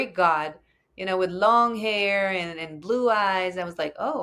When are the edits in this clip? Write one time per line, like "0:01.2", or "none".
none